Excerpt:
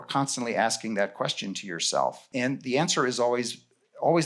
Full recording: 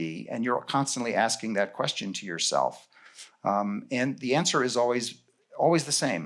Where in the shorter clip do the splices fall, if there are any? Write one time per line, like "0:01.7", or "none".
0:02.3

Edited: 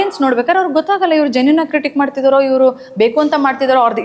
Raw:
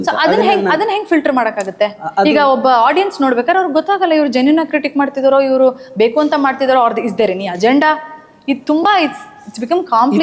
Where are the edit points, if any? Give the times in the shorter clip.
none

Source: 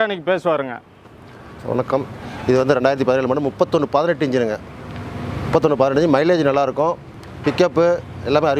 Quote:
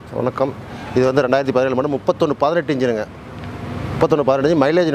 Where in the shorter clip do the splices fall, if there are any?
none

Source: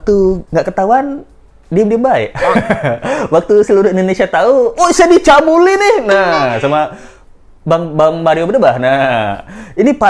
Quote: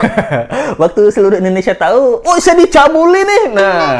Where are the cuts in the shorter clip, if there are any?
none

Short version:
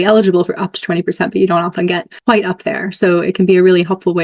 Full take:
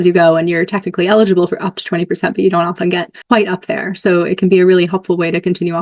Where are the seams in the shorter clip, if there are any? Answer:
none

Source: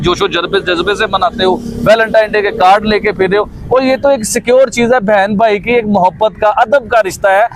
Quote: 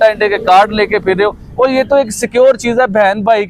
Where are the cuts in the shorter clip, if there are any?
none

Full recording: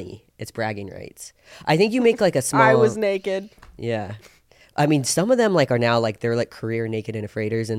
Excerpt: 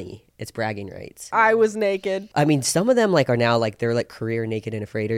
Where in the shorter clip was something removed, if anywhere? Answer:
0:01.3
0:02.3

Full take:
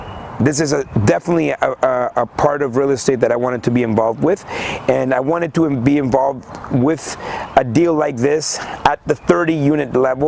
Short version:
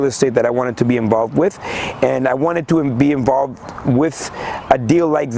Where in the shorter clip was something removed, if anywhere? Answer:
none

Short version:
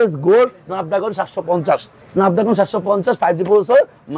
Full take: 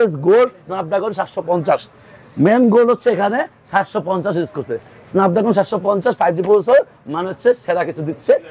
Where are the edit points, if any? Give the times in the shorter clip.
0:02.0

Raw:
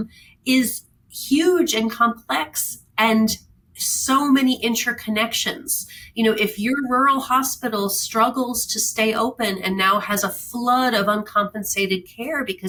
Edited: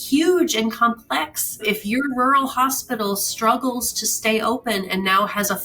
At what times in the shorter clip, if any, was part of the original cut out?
0:01.6

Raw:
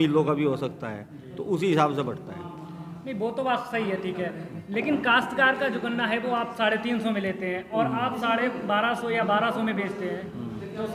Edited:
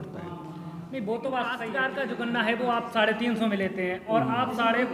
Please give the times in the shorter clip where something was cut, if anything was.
0:01.8

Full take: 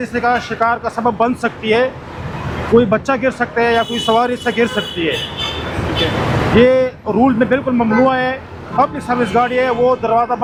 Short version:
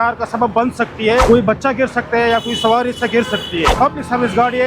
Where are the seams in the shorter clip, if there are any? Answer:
0:01.2
0:03.7

